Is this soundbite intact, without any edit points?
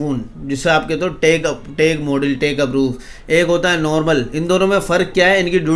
yes; 0 cuts

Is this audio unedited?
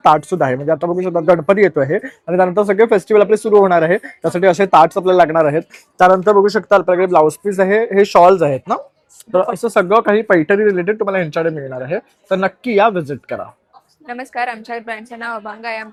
yes; 0 cuts

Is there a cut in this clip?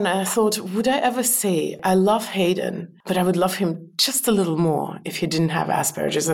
yes; 2 cuts; at 1.8 s, 2.9 s

